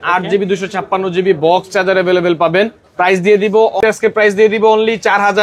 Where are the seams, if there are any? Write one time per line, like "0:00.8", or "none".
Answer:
0:03.8